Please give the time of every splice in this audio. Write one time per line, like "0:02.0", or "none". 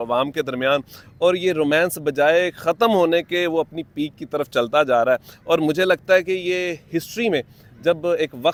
none